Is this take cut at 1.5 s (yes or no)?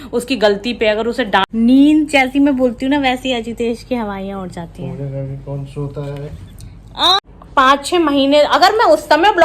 yes